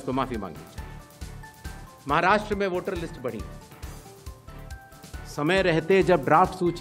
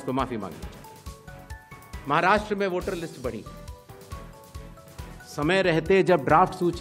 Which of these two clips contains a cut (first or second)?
second